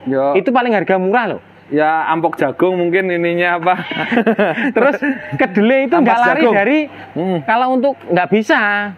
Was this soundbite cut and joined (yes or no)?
no